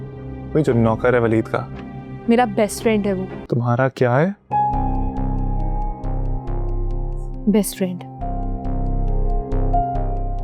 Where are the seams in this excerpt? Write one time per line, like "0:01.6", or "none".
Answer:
0:03.3